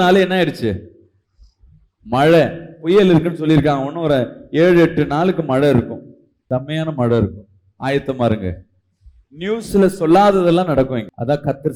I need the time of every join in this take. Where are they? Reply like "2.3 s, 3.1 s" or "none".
none